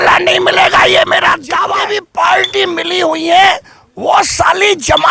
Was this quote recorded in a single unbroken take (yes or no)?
no